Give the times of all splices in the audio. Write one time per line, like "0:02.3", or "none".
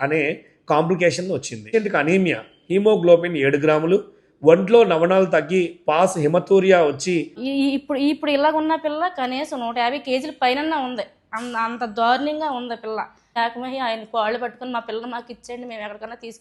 0:01.7
0:07.4
0:13.4